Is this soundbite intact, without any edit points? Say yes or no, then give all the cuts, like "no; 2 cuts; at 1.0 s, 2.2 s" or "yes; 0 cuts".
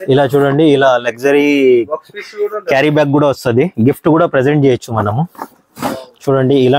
yes; 0 cuts